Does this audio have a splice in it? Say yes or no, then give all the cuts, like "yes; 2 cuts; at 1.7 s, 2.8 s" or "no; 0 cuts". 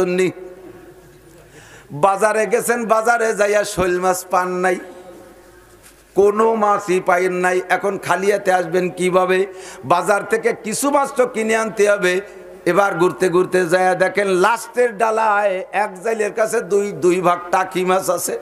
no; 0 cuts